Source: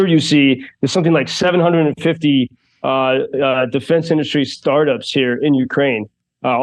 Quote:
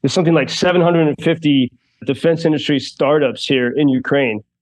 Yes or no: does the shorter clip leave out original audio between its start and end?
yes